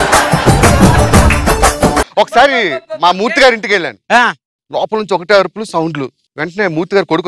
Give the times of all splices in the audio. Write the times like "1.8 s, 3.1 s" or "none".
2.1 s, 4.5 s